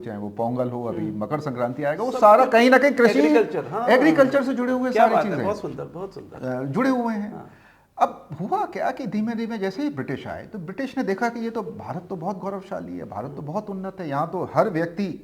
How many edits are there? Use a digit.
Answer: 0